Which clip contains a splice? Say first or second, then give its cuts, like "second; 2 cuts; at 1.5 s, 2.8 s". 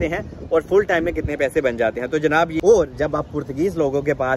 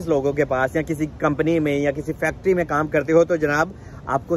first; 1 cut; at 2.5 s